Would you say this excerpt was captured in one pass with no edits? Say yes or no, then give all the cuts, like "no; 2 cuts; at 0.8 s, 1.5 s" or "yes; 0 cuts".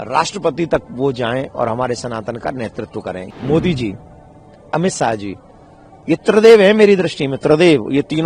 no; 1 cut; at 3.3 s